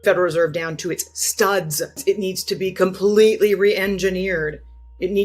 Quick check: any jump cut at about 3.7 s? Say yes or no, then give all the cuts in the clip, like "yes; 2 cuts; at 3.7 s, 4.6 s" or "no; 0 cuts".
no; 1 cut; at 2.0 s